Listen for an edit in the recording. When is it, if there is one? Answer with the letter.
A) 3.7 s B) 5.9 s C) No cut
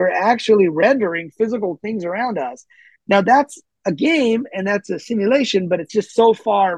B